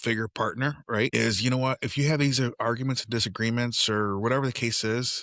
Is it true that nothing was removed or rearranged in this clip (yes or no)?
no